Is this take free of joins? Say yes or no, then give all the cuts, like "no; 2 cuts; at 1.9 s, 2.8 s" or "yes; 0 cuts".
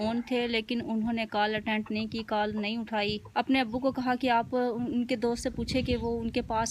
no; 1 cut; at 3.2 s